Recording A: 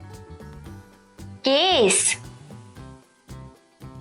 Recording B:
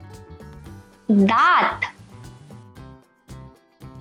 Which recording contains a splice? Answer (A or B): A